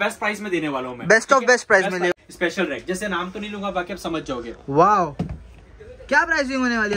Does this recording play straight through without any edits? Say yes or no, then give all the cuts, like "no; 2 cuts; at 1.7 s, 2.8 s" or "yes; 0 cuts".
no; 1 cut; at 2.2 s